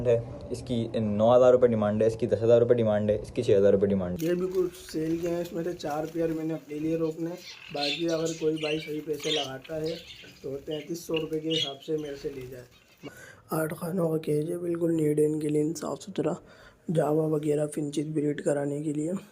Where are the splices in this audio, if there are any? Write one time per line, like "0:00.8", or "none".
0:04.1
0:13.0